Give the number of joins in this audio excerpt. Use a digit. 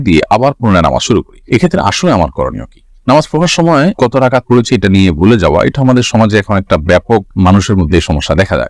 0